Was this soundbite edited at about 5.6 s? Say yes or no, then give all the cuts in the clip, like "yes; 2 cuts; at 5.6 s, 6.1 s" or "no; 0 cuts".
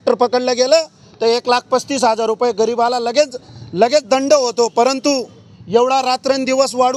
no; 0 cuts